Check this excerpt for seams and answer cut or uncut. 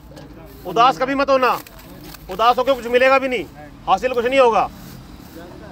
uncut